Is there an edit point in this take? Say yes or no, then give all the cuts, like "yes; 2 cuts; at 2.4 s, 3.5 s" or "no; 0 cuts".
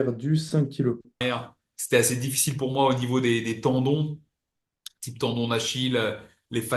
yes; 1 cut; at 1.2 s